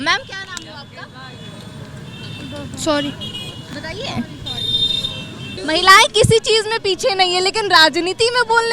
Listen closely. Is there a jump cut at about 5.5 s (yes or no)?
yes